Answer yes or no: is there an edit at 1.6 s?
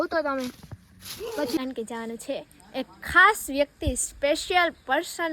yes